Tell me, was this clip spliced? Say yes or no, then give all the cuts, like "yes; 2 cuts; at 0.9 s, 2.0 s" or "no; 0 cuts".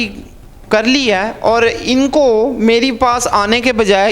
no; 0 cuts